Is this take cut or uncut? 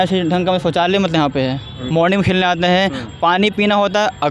cut